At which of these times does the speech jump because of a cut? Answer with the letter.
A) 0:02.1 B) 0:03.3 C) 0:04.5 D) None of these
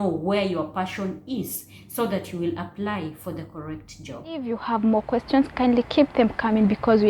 C